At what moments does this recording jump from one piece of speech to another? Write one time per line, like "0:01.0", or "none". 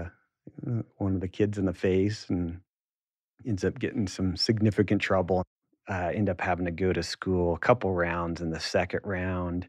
0:05.6